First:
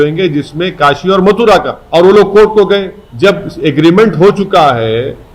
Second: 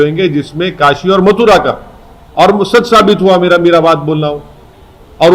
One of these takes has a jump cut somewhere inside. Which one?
first; 2 cuts; at 1.8 s, 3.0 s

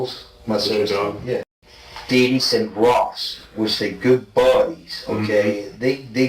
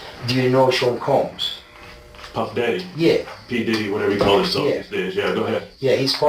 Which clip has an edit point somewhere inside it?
first; 1 cut; at 1.4 s

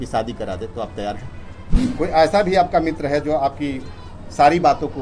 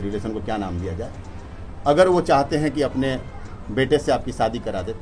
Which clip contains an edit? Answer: first; 1 cut; at 1.9 s

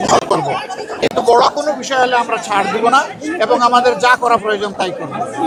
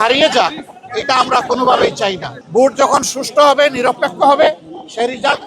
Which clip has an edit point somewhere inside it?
second; 1 cut; at 2.3 s

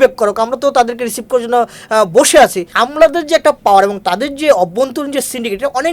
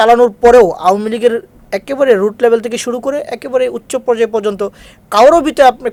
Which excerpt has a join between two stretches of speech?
first; 1 cut; at 2.7 s

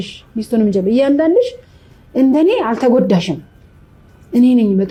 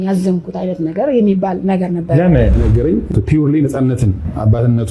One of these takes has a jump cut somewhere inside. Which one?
second; 1 cut; at 2.6 s

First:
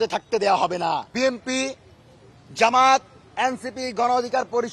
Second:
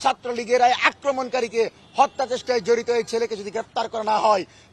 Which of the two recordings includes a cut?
first; 1 cut; at 1.1 s

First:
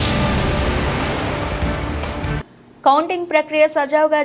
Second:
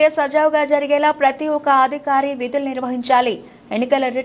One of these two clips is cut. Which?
first; 1 cut; at 2.3 s

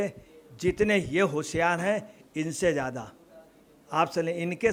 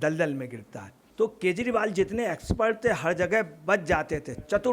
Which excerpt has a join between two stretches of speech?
second; 1 cut; at 1.0 s

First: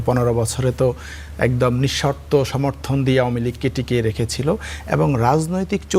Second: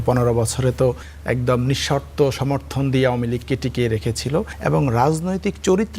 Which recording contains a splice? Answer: second; 2 cuts; at 1.1 s, 4.5 s

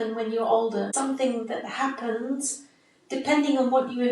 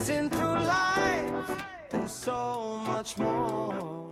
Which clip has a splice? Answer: first; 1 cut; at 0.9 s

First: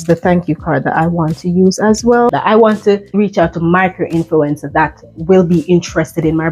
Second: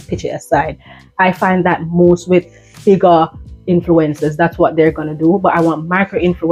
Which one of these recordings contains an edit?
first; 2 cuts; at 2.2 s, 3.1 s

